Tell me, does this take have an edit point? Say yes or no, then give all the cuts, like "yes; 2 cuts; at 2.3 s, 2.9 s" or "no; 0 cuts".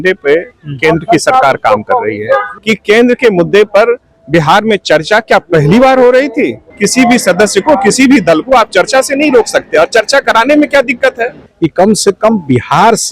yes; 3 cuts; at 2.5 s, 6.6 s, 11.4 s